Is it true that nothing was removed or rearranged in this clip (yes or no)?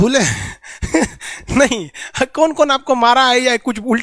yes